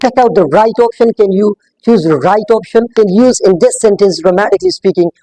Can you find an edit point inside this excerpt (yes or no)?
yes